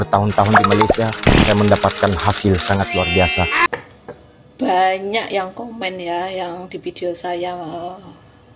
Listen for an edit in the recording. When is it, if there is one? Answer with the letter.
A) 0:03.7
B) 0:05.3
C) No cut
A